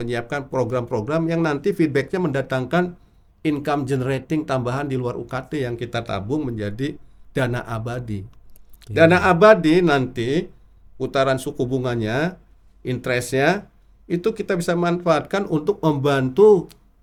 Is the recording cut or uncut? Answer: uncut